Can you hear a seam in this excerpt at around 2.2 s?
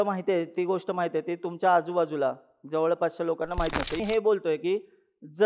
no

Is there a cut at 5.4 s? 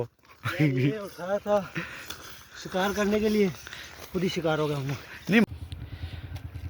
yes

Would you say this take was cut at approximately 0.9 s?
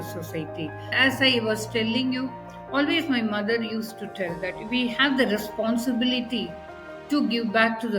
yes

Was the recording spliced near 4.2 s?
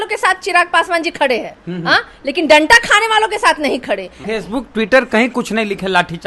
yes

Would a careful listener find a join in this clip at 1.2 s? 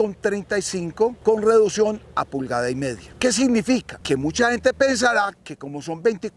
yes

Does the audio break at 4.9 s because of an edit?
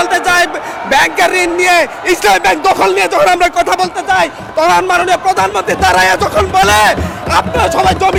no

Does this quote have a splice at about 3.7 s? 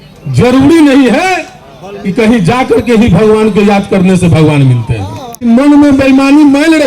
no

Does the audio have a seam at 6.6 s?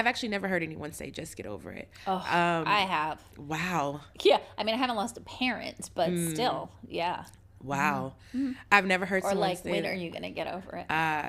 no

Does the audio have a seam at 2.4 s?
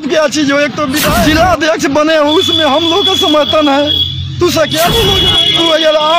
no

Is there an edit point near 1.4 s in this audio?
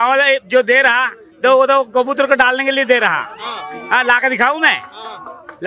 no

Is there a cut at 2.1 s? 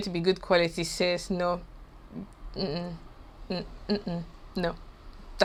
no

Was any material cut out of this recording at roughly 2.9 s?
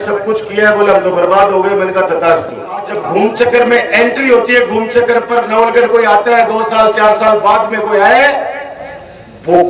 yes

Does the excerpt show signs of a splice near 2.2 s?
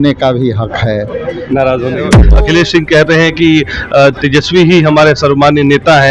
yes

